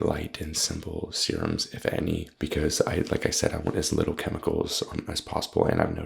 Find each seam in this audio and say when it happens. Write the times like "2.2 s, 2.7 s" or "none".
2.3 s